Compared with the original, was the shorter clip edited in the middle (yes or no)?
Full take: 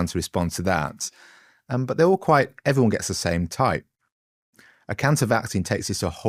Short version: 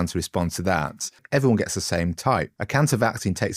yes